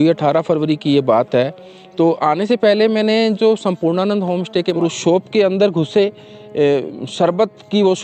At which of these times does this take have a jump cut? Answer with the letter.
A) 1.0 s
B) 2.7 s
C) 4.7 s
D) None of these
C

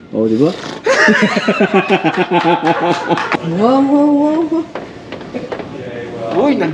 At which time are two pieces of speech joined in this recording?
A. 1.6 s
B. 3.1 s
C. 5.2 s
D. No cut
B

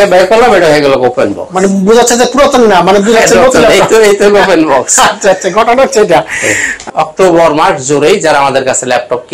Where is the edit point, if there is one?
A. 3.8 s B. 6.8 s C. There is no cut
B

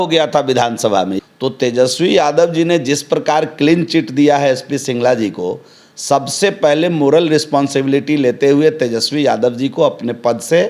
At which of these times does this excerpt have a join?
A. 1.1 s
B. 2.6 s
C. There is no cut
A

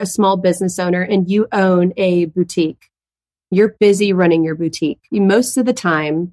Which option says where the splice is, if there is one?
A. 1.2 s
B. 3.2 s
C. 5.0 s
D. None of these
C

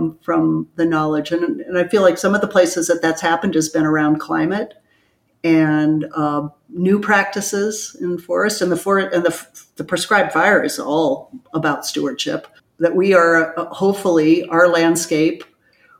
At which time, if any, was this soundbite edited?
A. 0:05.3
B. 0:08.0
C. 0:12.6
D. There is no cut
C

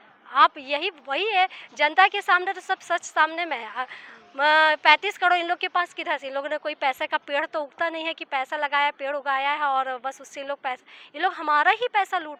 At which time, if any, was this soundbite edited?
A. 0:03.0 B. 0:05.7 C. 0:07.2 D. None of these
D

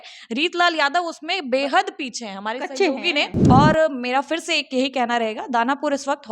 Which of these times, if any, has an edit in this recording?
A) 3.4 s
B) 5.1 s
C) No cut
A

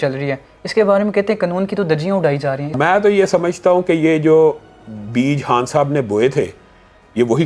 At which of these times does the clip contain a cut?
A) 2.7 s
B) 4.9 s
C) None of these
A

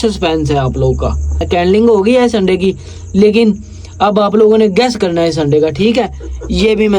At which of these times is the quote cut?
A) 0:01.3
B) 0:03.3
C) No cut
A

